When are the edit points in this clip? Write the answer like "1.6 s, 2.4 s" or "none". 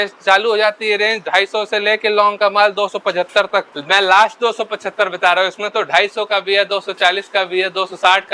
3.8 s